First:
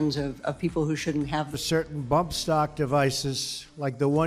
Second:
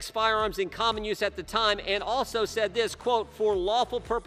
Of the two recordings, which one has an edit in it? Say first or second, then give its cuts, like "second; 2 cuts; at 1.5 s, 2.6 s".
first; 1 cut; at 1.5 s